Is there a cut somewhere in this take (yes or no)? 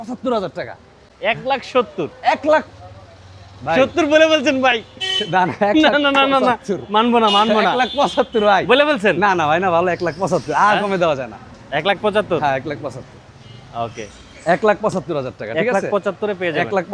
no